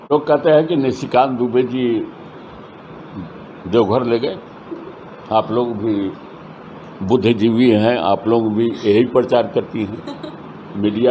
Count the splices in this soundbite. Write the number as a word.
zero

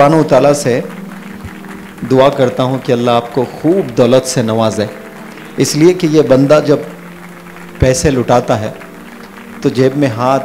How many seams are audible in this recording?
zero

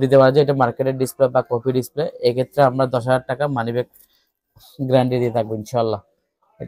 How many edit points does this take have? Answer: zero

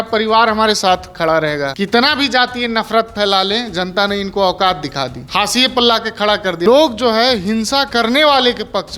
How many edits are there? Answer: three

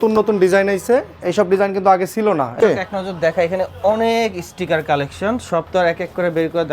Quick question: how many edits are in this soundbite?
one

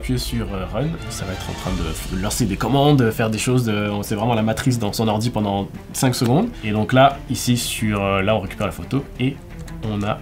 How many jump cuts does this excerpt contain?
one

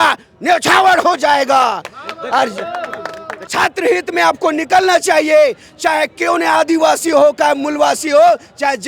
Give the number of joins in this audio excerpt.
one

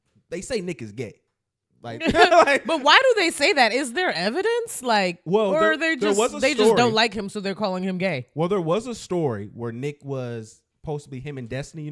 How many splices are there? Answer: zero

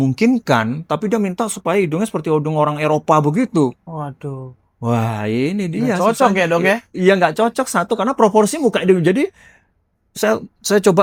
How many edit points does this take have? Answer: zero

